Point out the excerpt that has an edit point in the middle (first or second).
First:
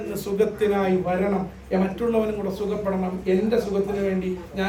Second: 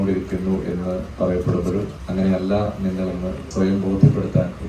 second